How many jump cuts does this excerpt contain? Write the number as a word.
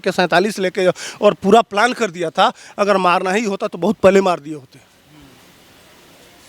zero